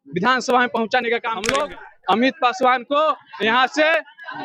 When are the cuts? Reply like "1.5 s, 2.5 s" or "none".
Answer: 1.4 s

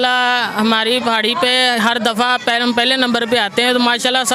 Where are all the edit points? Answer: none

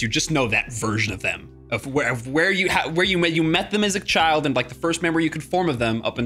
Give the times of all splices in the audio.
none

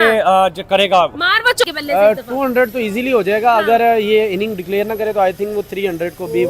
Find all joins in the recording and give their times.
1.6 s

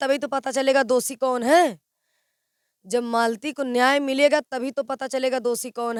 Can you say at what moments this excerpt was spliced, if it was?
none

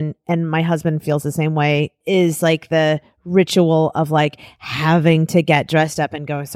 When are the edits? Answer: 2.0 s

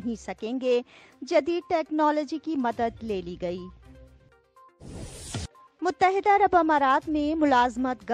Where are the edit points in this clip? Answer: 4.1 s, 5.3 s

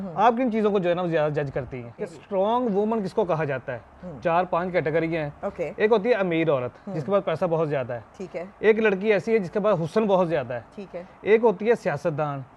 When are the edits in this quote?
2.1 s

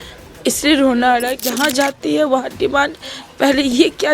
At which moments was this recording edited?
1.4 s

